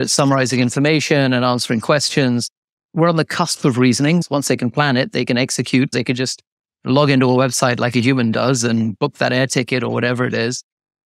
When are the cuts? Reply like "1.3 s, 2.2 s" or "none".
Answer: 4.2 s, 5.9 s